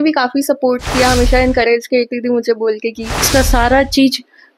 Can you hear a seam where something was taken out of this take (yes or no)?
yes